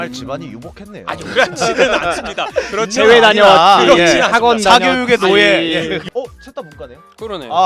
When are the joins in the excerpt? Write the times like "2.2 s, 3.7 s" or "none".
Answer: 6.0 s